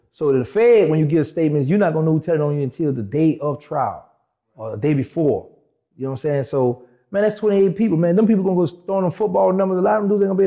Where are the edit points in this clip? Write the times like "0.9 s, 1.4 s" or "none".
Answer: none